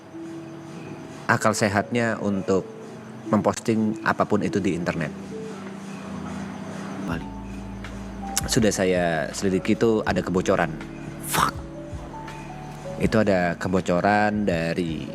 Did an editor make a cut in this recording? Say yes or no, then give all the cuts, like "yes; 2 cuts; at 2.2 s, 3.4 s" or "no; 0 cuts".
yes; 1 cut; at 7.1 s